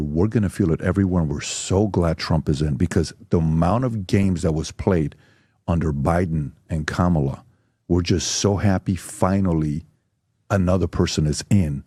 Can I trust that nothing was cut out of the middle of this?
yes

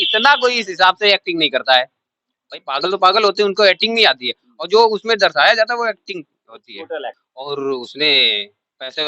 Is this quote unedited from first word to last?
no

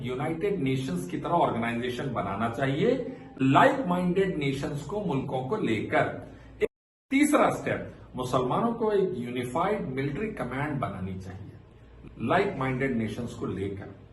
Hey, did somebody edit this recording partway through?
yes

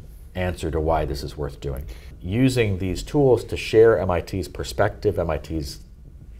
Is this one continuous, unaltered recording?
no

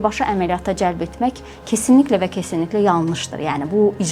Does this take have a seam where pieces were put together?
no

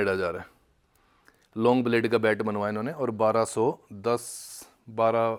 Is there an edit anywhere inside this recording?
no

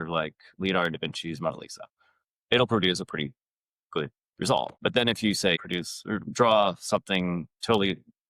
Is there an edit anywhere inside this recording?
yes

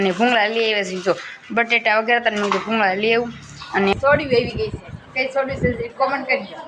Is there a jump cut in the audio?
yes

